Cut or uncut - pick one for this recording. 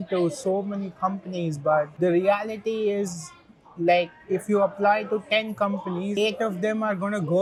uncut